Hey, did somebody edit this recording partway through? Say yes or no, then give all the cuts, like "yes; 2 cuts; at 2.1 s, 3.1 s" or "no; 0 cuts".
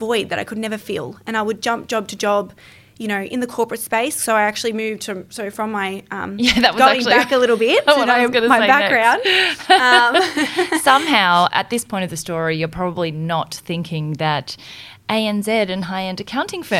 no; 0 cuts